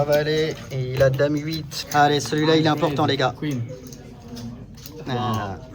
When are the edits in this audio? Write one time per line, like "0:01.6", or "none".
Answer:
0:01.7